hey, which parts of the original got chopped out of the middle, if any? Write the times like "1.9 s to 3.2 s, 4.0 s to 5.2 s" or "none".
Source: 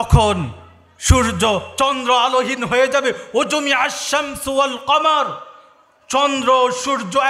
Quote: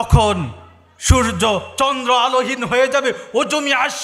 none